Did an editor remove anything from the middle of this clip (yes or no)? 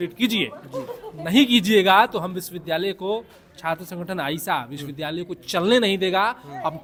no